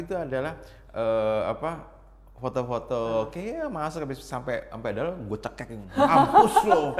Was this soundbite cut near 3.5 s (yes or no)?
no